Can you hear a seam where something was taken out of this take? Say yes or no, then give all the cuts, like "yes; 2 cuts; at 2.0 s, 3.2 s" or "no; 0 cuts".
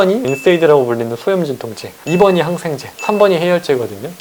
no; 0 cuts